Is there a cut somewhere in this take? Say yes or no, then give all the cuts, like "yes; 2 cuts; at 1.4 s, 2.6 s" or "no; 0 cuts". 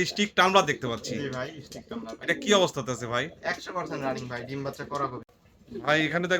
yes; 1 cut; at 5.3 s